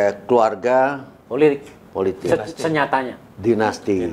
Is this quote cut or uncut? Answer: uncut